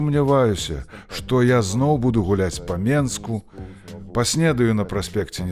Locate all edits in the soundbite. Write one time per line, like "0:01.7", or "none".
none